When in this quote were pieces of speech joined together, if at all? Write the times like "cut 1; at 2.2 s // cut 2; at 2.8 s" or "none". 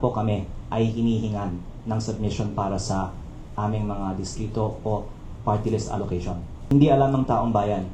cut 1; at 6.5 s